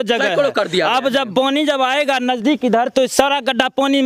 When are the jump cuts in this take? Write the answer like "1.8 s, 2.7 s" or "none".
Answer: none